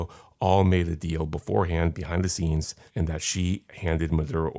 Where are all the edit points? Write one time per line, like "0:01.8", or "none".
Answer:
0:02.8
0:03.7